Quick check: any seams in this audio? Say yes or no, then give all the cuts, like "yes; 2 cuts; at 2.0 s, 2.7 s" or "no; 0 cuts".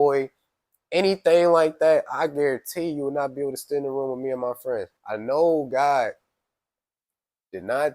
yes; 1 cut; at 5.0 s